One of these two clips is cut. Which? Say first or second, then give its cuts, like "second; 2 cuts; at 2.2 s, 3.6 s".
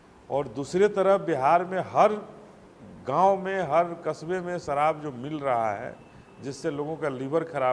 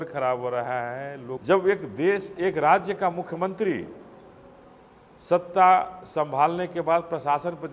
second; 1 cut; at 1.3 s